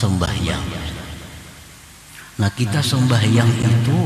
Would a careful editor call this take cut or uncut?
uncut